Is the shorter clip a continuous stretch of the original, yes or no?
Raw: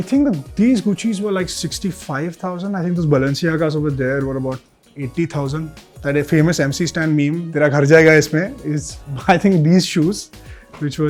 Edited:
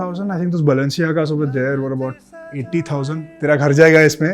no